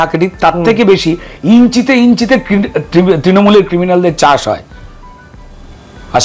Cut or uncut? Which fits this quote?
uncut